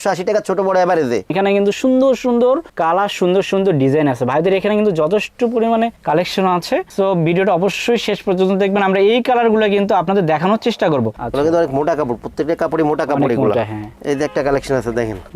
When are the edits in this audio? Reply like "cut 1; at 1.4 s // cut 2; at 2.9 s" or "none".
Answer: cut 1; at 1.3 s // cut 2; at 11.2 s